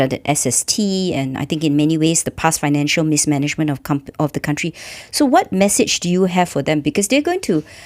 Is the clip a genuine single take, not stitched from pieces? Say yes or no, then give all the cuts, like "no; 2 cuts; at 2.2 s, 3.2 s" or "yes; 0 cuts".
yes; 0 cuts